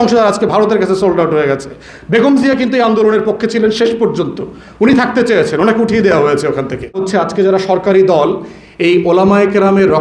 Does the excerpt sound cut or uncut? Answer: cut